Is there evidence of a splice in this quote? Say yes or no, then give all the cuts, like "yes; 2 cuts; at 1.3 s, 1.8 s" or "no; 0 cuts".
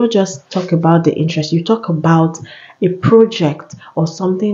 no; 0 cuts